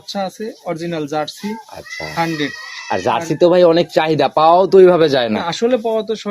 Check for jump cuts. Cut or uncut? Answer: uncut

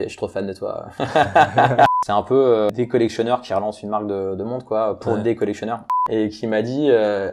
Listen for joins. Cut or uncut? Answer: cut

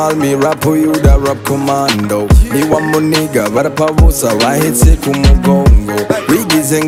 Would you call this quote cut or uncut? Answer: uncut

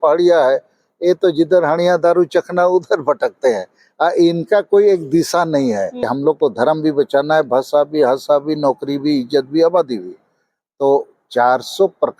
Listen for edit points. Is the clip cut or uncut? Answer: cut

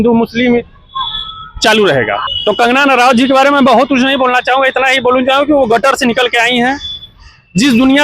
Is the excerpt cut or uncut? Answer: cut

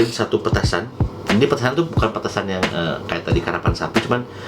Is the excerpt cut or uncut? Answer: uncut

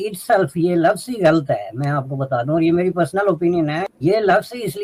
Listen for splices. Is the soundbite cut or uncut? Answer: uncut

